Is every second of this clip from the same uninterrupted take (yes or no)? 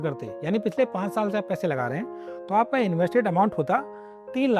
yes